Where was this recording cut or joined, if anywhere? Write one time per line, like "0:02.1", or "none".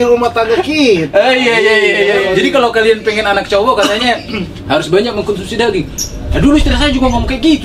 0:02.3